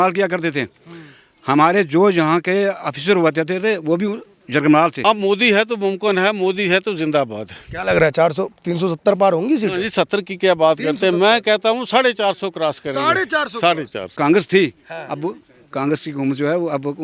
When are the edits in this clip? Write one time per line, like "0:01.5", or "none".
0:05.0
0:14.0